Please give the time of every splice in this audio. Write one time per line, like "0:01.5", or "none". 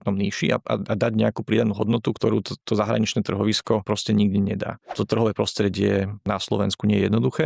0:02.2
0:03.8
0:04.9
0:06.2